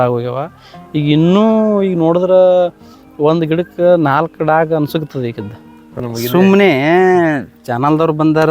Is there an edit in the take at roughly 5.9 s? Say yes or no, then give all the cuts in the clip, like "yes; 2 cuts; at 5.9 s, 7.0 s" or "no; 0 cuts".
yes; 1 cut; at 5.9 s